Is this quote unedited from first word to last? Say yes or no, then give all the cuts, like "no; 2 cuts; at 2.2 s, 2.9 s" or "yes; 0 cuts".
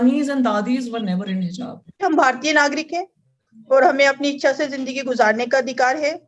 no; 1 cut; at 2.0 s